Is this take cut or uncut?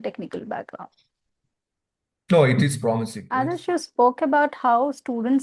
cut